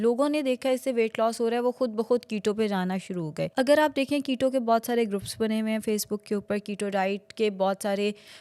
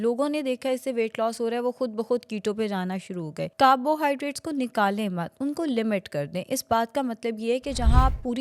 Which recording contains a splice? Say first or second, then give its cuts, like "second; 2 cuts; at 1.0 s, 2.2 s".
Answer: second; 1 cut; at 3.5 s